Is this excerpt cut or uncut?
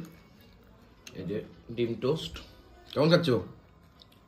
uncut